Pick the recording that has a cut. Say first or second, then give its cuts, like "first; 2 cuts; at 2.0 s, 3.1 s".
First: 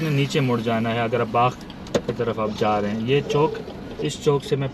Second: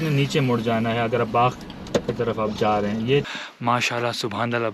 second; 1 cut; at 3.3 s